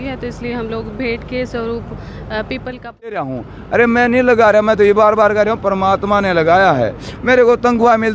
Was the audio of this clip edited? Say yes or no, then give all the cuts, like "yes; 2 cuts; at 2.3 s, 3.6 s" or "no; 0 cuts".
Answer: yes; 1 cut; at 3.3 s